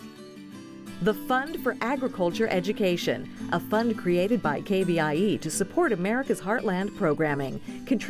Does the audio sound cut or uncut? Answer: cut